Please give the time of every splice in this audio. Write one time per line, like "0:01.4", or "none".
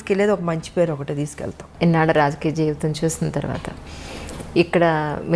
0:01.6